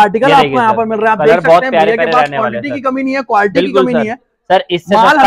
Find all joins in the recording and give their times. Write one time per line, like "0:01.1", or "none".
none